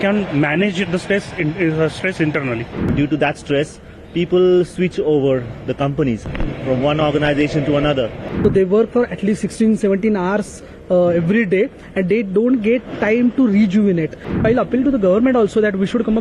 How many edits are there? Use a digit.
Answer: 3